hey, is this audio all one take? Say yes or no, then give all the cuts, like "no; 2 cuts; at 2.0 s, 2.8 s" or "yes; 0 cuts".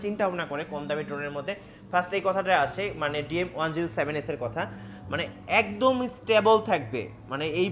yes; 0 cuts